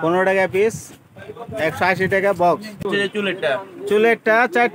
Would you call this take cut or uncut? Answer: cut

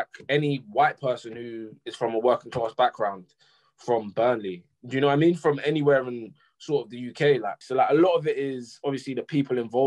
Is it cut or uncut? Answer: cut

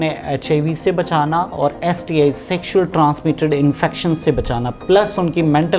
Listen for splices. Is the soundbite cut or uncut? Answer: uncut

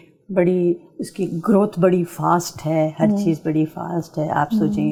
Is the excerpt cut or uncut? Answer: uncut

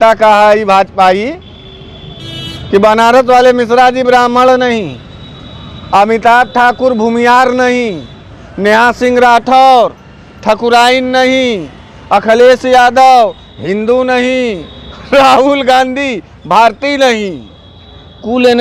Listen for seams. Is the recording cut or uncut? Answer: uncut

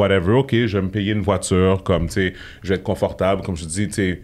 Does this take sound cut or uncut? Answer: uncut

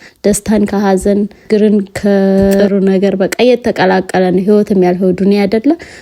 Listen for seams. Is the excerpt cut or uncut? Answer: cut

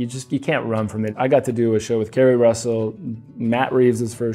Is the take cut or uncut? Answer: cut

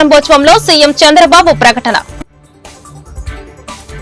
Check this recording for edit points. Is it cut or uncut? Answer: uncut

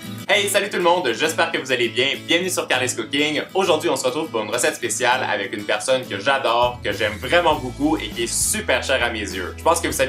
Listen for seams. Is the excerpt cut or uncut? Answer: uncut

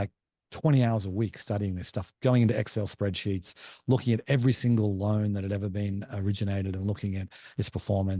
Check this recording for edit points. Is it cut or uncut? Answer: cut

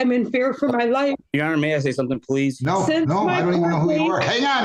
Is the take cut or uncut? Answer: cut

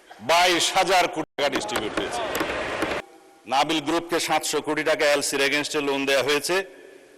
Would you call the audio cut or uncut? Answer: cut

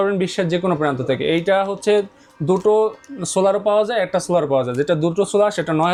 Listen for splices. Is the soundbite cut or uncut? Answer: uncut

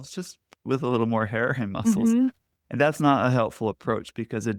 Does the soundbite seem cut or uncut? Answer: uncut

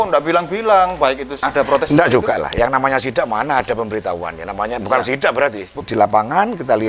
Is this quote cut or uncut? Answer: cut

